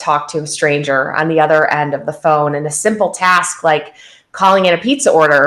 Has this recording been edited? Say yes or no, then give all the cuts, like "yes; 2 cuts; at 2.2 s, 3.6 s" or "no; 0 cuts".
no; 0 cuts